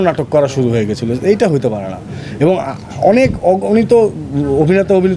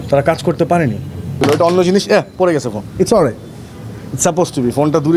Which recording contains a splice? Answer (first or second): second